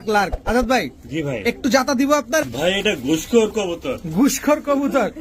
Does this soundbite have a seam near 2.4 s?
yes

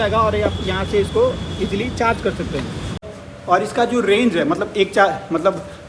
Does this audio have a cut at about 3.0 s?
yes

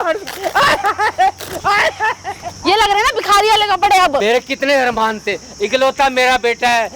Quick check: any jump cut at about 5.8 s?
no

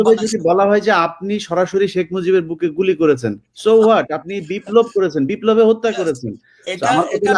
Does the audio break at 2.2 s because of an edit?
no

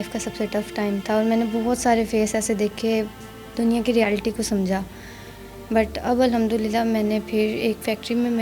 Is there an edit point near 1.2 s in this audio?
no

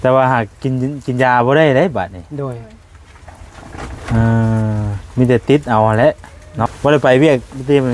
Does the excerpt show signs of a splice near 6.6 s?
yes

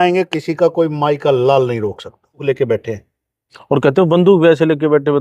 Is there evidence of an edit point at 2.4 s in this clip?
yes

